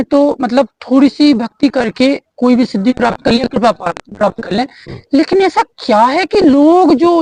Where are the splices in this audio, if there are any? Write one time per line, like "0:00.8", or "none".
none